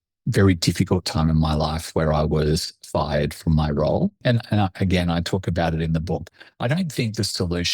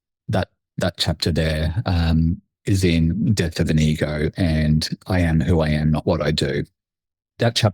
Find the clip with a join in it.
first; 1 cut; at 4.2 s

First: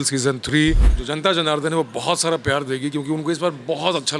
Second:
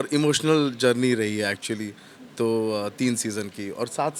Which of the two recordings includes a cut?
first; 1 cut; at 0.9 s

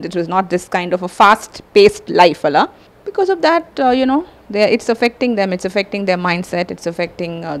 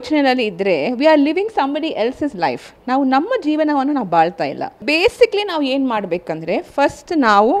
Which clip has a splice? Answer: second; 1 cut; at 4.8 s

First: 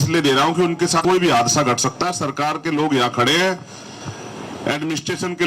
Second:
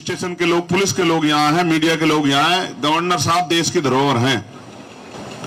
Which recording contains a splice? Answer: first; 1 cut; at 1.0 s

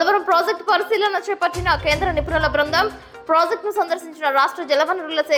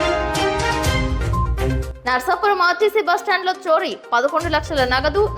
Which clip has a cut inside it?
second; 1 cut; at 1.9 s

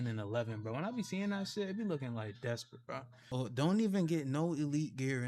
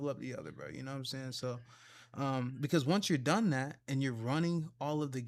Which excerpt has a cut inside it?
first; 1 cut; at 3.3 s

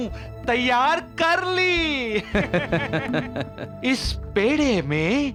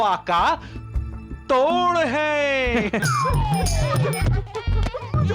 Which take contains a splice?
second; 1 cut; at 3.0 s

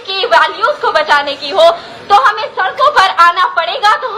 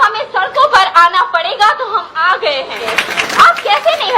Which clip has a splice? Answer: second; 1 cut; at 2.9 s

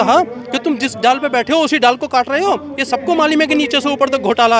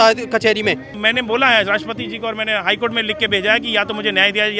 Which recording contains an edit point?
second; 1 cut; at 0.9 s

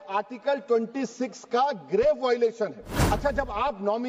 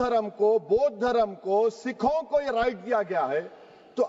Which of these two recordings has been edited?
first; 1 cut; at 2.9 s

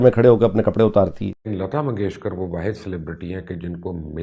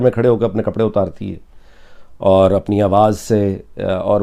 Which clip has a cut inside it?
first; 1 cut; at 1.6 s

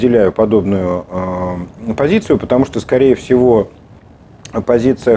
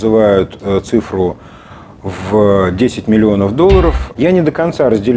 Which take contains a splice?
second; 1 cut; at 4.0 s

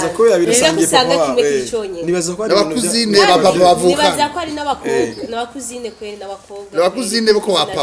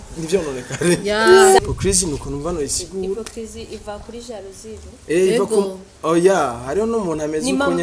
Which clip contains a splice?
second; 1 cut; at 1.6 s

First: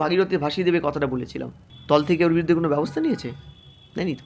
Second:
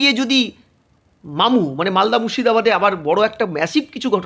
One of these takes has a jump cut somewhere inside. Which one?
first; 1 cut; at 1.7 s

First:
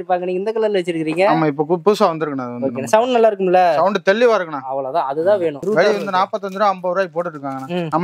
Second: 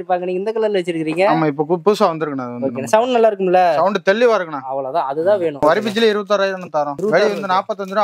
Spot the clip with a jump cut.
first; 1 cut; at 5.6 s

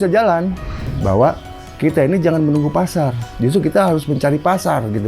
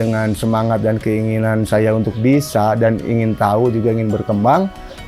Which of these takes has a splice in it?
first; 1 cut; at 0.9 s

